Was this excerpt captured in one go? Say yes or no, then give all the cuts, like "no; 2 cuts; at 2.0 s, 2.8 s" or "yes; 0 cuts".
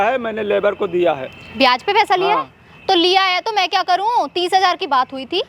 yes; 0 cuts